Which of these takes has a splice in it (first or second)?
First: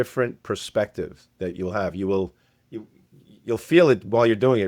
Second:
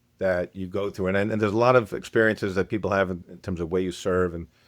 second